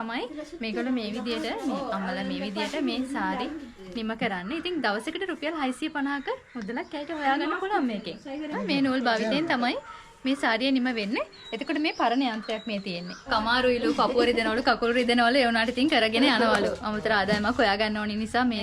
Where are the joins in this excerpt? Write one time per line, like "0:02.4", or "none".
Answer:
0:08.5
0:13.3